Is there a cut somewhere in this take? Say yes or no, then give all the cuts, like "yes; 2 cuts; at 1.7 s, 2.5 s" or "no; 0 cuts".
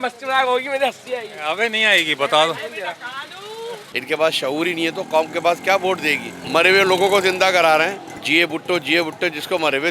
yes; 3 cuts; at 3.9 s, 6.3 s, 8.1 s